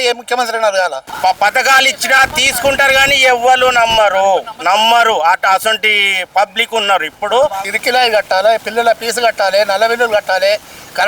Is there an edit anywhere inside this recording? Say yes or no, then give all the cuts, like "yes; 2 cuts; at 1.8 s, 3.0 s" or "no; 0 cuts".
yes; 2 cuts; at 1.0 s, 7.7 s